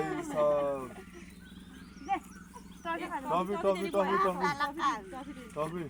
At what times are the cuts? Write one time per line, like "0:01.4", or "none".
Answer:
none